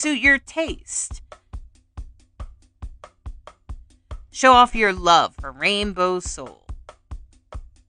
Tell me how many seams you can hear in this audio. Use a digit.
0